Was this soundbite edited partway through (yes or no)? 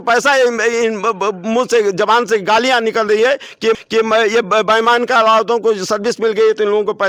no